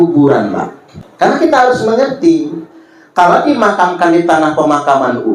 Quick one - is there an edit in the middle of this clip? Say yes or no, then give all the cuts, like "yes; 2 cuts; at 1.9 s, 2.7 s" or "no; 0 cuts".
yes; 1 cut; at 1.4 s